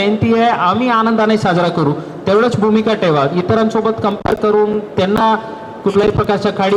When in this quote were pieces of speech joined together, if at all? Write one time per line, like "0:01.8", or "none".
none